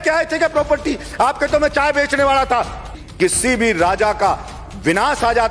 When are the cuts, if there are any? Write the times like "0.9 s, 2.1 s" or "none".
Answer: 3.0 s